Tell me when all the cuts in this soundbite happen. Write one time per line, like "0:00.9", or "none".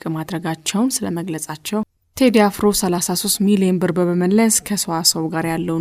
0:02.0